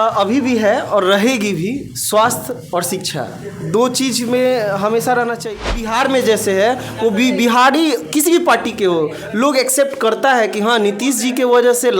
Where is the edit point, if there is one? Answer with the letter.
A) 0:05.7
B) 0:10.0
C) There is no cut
A